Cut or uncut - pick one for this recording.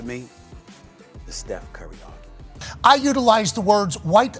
cut